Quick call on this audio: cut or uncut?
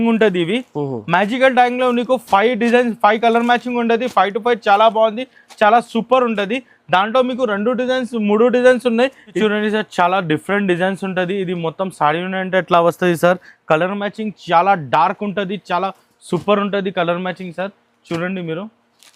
cut